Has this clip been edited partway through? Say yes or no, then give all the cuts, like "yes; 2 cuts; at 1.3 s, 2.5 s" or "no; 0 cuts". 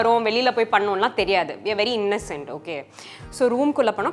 no; 0 cuts